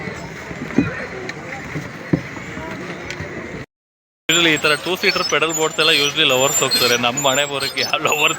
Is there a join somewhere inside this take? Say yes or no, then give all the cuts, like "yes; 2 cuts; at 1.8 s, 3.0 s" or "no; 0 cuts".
yes; 1 cut; at 3.7 s